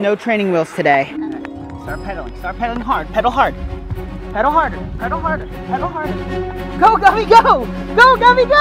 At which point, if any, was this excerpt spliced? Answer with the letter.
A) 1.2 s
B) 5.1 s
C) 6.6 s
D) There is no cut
A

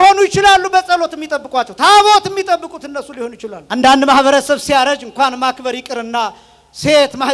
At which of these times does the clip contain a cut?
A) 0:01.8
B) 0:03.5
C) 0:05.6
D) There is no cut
B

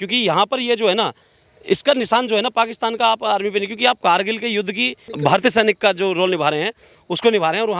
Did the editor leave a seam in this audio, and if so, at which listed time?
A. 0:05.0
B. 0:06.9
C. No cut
A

